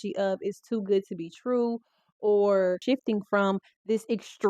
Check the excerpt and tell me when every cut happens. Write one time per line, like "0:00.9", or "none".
0:02.8